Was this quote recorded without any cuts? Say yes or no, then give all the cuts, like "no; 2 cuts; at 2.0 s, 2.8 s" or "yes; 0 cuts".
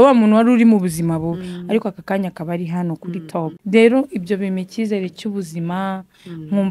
no; 1 cut; at 3.6 s